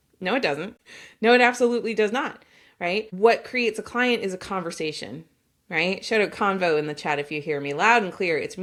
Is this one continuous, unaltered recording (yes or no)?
yes